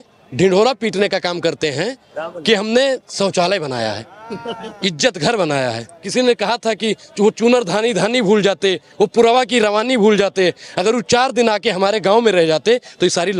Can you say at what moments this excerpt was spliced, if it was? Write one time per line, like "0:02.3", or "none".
0:05.9